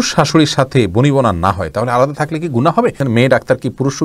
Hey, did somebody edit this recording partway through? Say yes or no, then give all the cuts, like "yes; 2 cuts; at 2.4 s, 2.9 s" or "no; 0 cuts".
yes; 1 cut; at 3.0 s